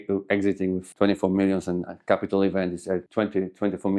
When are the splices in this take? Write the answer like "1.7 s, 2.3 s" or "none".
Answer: 3.1 s